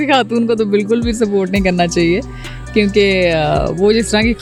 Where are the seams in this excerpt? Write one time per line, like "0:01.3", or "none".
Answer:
none